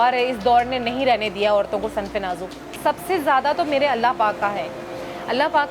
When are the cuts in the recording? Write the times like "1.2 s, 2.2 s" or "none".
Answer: 2.8 s